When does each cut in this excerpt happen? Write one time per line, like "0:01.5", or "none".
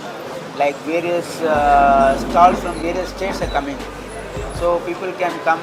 none